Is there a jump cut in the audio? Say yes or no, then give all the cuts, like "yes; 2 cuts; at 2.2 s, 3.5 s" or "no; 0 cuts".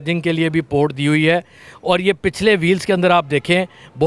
no; 0 cuts